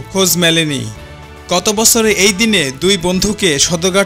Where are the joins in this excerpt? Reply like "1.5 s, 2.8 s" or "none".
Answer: none